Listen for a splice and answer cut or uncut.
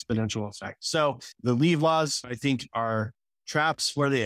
cut